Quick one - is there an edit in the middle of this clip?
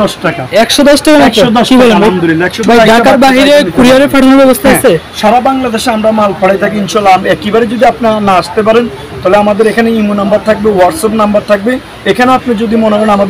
yes; 1 cut; at 2.6 s

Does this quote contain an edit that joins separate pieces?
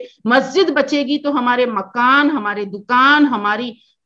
no; 0 cuts

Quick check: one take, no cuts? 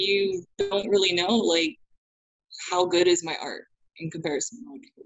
yes; 0 cuts

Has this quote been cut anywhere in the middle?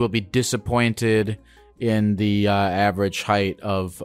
no; 0 cuts

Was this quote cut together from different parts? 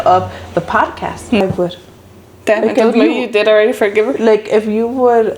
yes; 1 cut; at 1.4 s

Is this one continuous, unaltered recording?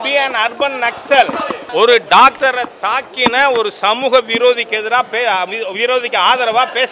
no; 1 cut; at 1.5 s

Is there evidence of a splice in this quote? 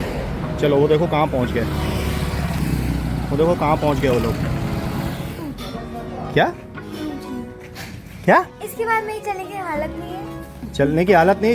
yes; 1 cut; at 5.3 s

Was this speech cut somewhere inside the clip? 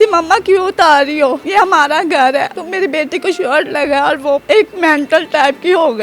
yes; 3 cuts; at 1.4 s, 2.6 s, 4.4 s

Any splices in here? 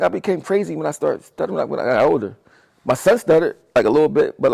no; 0 cuts

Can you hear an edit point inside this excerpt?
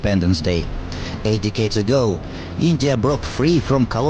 no; 0 cuts

